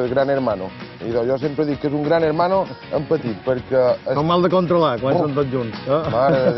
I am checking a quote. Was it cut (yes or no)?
no